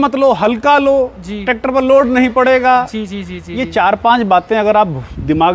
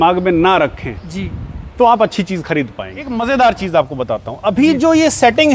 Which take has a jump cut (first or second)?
second